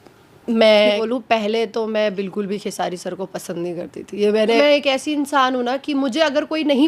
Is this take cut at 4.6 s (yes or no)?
yes